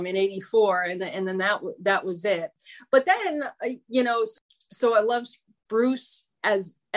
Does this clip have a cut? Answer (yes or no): yes